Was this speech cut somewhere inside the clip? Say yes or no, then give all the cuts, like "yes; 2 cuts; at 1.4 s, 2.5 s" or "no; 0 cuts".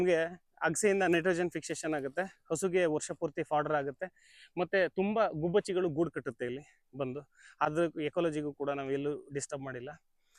no; 0 cuts